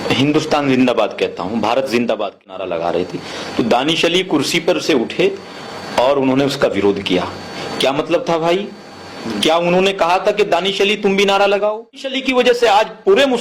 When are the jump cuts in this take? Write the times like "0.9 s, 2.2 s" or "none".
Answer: 2.6 s, 12.2 s